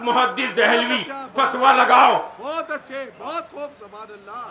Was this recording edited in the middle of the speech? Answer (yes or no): no